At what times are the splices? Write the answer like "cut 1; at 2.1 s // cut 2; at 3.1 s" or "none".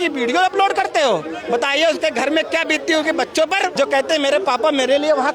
cut 1; at 3.7 s